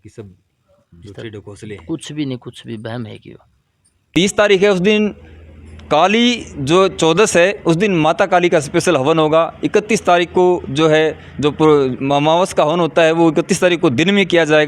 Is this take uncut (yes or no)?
no